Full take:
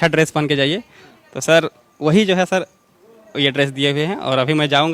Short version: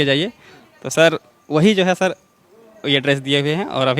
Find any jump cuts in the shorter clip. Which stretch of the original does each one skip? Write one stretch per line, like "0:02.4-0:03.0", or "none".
none